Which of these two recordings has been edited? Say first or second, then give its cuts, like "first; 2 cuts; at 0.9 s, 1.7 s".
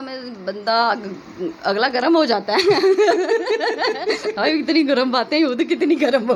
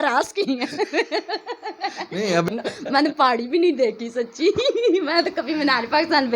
second; 1 cut; at 2.5 s